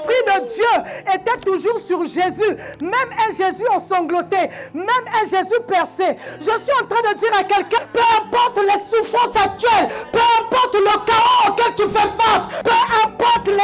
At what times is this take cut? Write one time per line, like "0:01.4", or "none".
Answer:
0:06.3
0:07.8
0:10.0
0:12.5